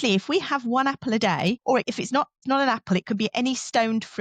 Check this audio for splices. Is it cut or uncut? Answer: uncut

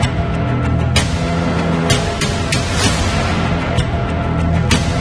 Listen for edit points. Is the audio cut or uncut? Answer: uncut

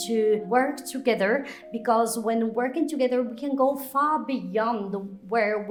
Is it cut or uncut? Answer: uncut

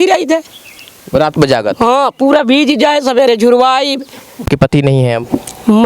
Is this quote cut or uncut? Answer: cut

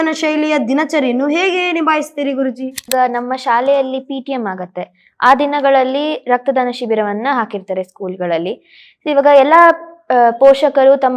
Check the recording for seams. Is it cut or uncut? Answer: cut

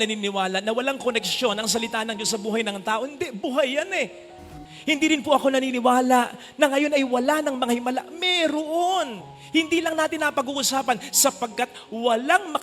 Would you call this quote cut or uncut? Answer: cut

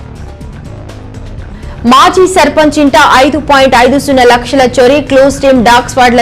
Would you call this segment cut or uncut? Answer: cut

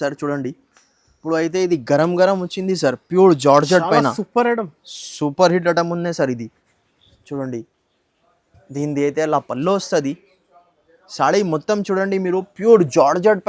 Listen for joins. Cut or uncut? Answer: uncut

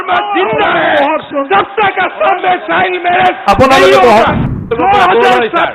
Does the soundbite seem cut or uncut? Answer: cut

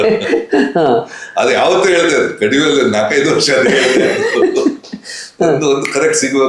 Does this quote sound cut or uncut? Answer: uncut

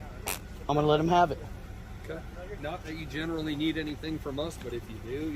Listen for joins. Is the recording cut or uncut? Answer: cut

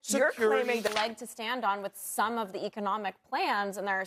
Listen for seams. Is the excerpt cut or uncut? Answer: cut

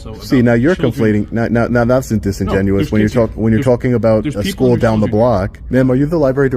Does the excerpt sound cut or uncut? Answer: cut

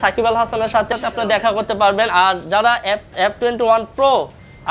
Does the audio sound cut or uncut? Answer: uncut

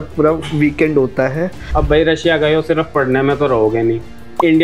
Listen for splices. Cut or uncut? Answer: cut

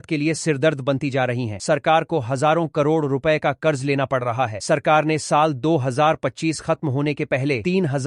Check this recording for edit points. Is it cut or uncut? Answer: uncut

